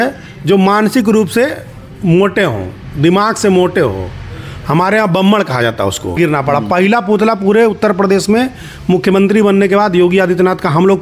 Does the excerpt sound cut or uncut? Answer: cut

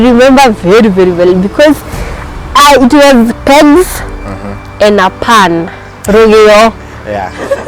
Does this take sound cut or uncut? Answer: uncut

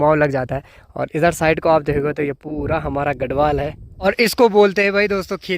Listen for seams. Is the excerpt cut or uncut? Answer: cut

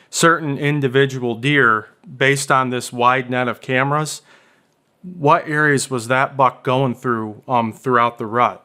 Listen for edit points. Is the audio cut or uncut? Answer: uncut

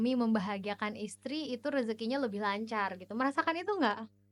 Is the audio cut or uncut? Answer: uncut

